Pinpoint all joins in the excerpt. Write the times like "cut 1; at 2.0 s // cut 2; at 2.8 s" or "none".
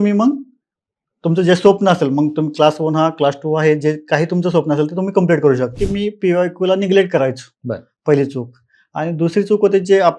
cut 1; at 5.7 s